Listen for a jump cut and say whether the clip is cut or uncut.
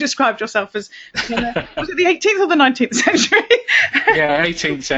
uncut